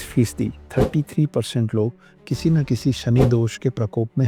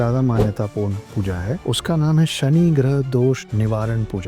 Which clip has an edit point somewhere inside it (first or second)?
second